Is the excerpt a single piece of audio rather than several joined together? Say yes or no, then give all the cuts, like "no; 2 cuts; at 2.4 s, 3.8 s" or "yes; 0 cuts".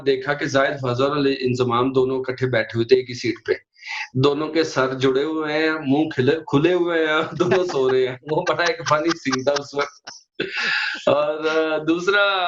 yes; 0 cuts